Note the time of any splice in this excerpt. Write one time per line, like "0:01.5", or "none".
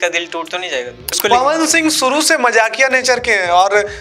0:01.0

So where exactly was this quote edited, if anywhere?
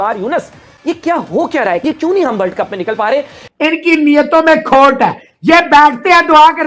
0:01.8
0:03.4

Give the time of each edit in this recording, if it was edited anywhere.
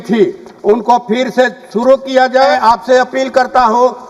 0:02.5

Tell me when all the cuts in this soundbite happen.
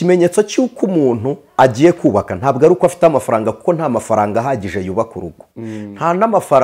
none

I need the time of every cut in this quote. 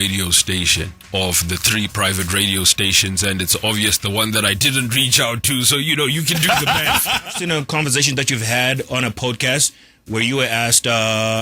0:01.0
0:07.3

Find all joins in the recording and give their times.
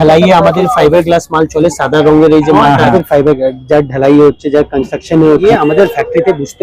0:02.9
0:05.4

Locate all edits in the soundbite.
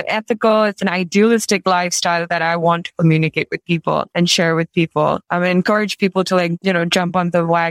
0:04.1
0:05.3
0:06.6

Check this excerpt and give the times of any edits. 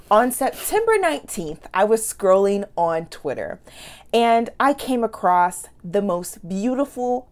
none

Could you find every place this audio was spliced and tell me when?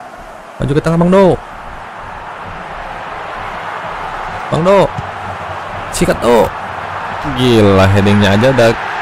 none

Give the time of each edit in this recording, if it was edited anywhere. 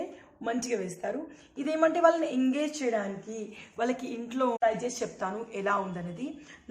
0:04.6

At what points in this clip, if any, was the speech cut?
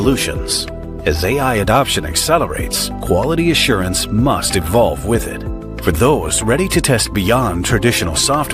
none

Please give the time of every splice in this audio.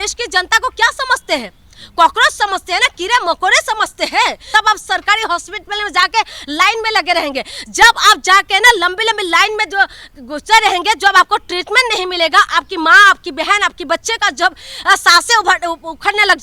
0:04.5

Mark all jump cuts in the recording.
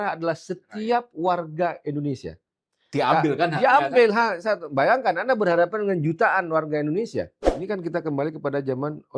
0:07.5

